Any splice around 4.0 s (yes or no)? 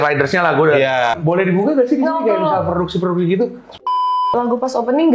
yes